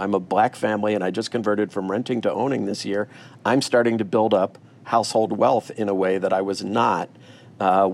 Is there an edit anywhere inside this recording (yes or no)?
no